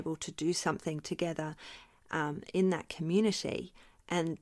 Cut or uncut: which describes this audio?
uncut